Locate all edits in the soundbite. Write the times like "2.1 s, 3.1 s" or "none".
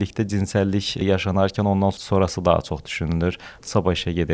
1.0 s, 2.0 s

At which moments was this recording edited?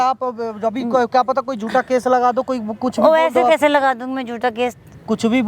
none

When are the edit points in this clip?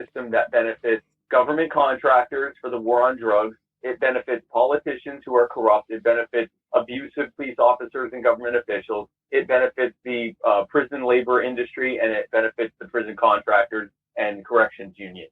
1.1 s

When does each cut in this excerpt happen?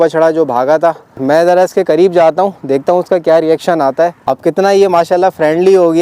1.2 s, 4.2 s

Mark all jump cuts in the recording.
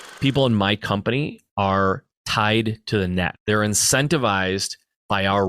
1.4 s, 3.4 s

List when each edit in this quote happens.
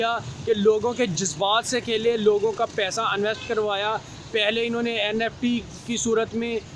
none

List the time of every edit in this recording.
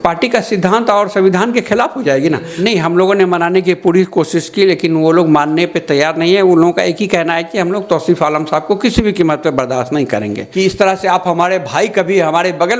2.5 s, 10.4 s

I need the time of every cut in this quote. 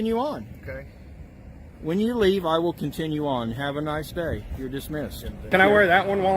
5.4 s

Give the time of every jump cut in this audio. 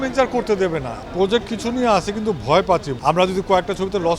1.0 s, 2.9 s

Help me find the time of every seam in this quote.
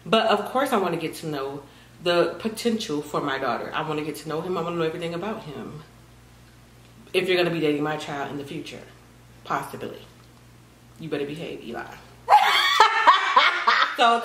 none

